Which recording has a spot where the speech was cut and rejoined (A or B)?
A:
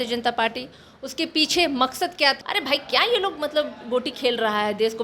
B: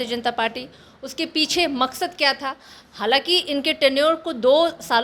A